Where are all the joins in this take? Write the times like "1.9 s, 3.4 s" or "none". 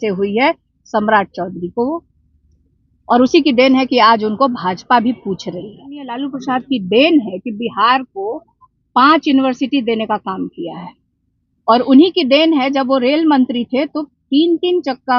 6.2 s